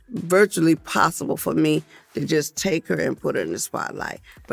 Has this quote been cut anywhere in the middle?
no; 0 cuts

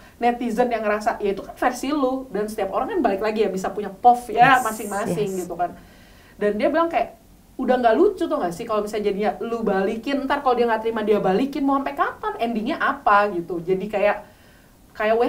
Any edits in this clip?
no; 0 cuts

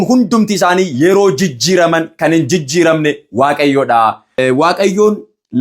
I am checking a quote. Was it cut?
yes; 1 cut; at 4.4 s

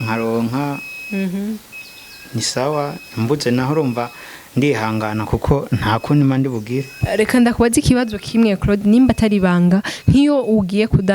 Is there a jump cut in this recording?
yes; 1 cut; at 6.9 s

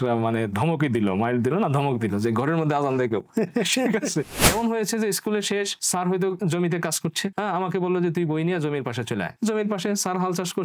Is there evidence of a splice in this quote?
yes; 1 cut; at 4.4 s

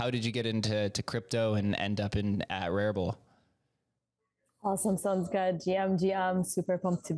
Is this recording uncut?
yes; 0 cuts

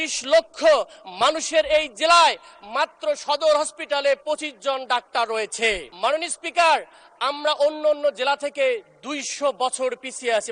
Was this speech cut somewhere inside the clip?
yes; 1 cut; at 5.9 s

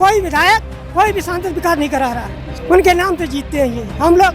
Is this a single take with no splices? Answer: no; 1 cut; at 2.5 s

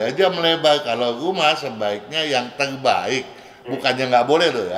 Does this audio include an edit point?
no; 0 cuts

